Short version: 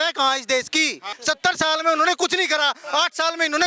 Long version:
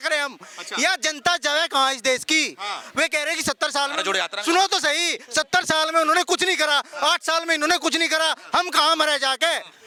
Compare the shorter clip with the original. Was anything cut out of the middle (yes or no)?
yes